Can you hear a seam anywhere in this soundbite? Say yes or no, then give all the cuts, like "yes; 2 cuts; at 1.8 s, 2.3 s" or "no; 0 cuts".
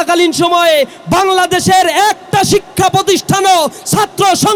no; 0 cuts